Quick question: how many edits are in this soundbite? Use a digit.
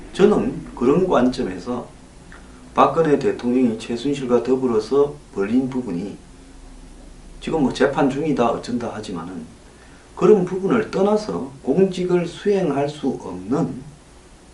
1